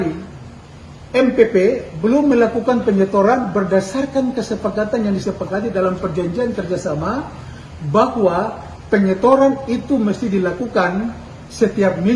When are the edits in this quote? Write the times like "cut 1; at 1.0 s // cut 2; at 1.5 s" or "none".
none